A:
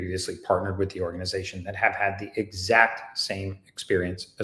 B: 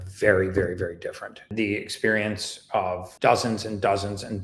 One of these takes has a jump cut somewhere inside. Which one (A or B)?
B